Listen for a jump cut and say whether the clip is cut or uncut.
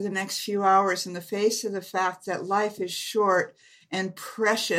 uncut